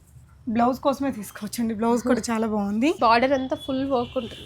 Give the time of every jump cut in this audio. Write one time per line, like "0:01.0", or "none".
0:03.0